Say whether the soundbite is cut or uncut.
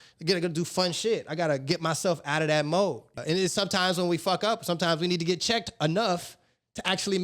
cut